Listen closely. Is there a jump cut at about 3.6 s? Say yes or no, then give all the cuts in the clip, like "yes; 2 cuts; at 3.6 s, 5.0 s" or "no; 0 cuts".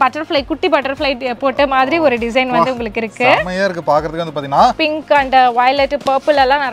no; 1 cut; at 4.8 s